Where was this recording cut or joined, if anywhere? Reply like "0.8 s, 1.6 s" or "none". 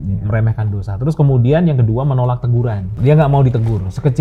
2.9 s